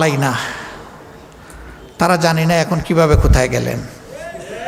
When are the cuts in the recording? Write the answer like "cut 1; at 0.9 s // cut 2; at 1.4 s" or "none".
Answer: none